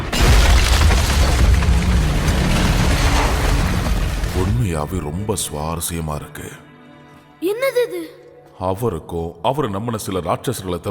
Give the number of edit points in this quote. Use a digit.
1